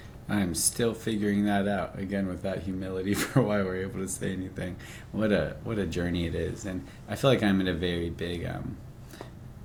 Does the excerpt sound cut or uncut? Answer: uncut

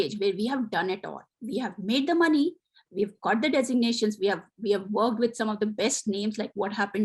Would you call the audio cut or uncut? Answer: uncut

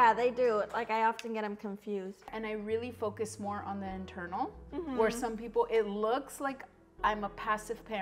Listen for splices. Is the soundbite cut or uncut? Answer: cut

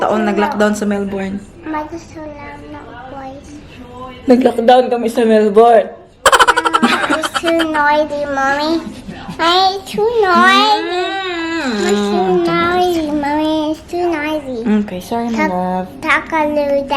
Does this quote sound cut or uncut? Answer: uncut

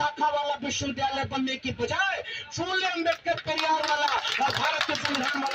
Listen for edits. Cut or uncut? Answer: uncut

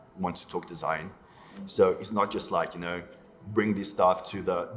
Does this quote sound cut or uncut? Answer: uncut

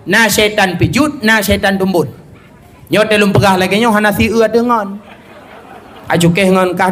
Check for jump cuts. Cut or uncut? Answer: uncut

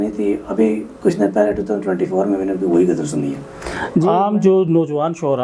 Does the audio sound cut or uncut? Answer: cut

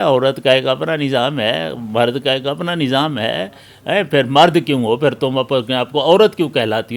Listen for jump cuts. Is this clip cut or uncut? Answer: uncut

